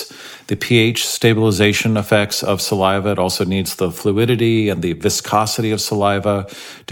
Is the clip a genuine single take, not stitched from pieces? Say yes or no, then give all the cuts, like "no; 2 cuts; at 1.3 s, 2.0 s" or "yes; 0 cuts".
yes; 0 cuts